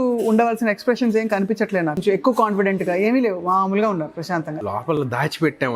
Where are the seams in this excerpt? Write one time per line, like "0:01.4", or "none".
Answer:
0:02.0
0:04.2